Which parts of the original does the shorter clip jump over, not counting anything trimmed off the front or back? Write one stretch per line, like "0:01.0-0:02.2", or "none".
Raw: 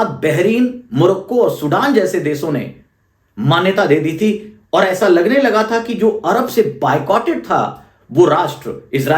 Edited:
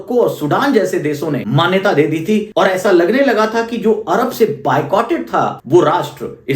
0:02.7-0:03.4
0:04.4-0:04.6
0:07.7-0:08.0